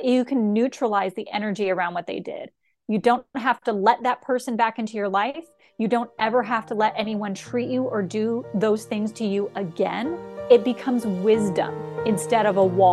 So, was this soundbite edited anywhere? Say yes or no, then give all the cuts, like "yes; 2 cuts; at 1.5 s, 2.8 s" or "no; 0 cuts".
yes; 2 cuts; at 10.3 s, 12.0 s